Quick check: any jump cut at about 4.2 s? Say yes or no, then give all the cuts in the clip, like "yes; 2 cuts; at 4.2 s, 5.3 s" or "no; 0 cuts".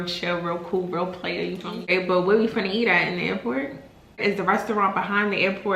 yes; 2 cuts; at 1.9 s, 4.2 s